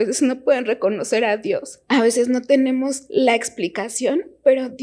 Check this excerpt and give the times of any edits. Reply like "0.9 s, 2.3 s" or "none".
1.7 s, 3.0 s

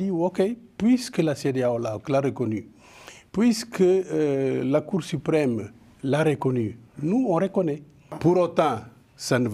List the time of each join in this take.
8.1 s

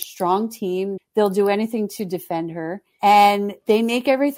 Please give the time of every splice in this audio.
1.0 s, 2.8 s, 3.5 s

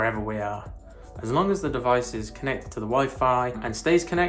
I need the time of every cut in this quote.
none

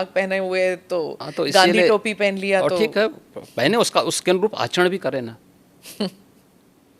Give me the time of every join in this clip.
none

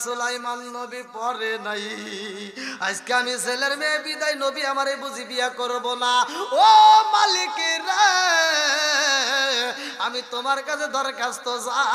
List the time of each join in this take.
none

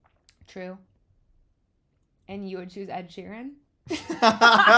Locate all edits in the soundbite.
none

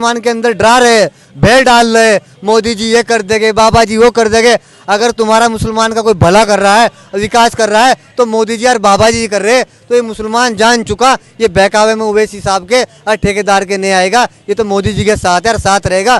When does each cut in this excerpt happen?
none

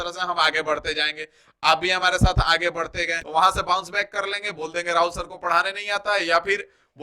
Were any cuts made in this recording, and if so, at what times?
3.2 s

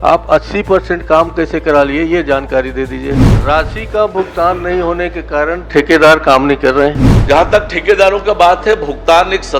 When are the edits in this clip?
3.3 s, 7.1 s

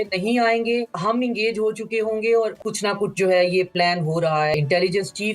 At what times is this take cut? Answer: 0.9 s, 2.6 s, 4.5 s

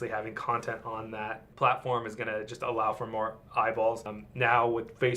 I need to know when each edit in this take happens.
1.4 s, 4.2 s

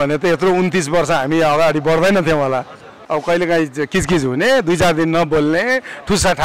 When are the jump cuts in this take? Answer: 2.9 s

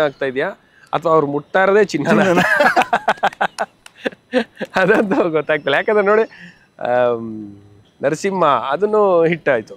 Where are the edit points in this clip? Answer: none

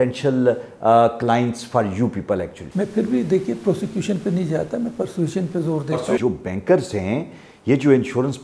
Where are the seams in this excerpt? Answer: 2.6 s, 6.1 s

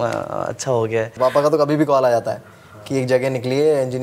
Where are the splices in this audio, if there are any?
1.1 s

